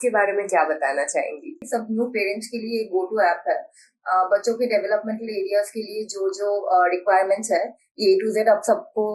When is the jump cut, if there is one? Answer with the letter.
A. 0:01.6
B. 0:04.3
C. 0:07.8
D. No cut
A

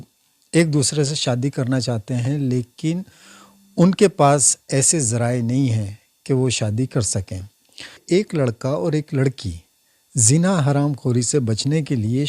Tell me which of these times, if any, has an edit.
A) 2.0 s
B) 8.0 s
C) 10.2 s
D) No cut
B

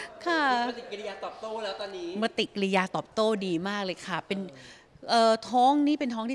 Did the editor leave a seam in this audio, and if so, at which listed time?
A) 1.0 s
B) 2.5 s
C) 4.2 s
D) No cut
D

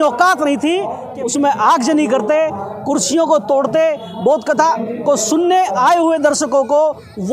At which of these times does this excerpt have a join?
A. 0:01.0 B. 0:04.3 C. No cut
A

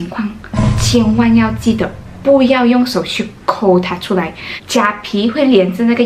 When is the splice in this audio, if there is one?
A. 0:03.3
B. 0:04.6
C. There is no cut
B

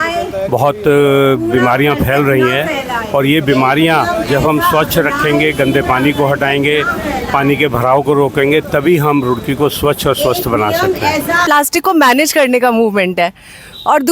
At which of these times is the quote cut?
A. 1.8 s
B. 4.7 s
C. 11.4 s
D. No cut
C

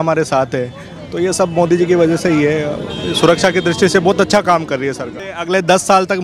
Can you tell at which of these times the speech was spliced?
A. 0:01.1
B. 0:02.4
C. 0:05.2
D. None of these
C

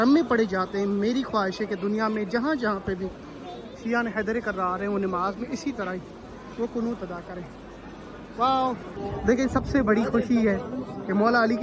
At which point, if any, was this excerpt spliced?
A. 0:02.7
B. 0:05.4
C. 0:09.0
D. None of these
C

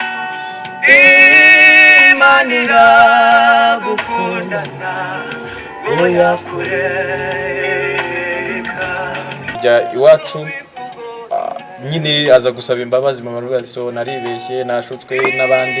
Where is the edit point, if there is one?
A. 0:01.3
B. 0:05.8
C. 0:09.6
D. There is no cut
C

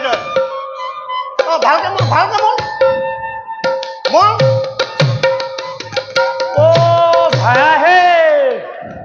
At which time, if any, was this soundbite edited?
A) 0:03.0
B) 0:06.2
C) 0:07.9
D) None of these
D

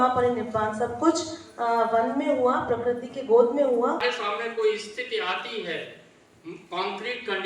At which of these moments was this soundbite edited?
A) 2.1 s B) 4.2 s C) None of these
B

